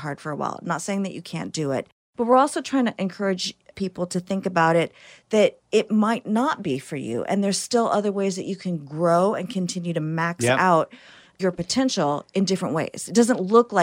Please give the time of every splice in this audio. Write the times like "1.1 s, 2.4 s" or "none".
2.0 s